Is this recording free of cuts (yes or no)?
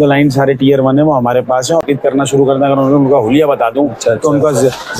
no